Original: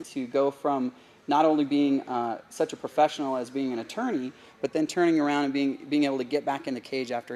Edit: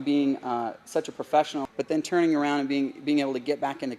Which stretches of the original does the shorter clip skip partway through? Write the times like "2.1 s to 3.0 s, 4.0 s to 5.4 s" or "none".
3.3 s to 4.5 s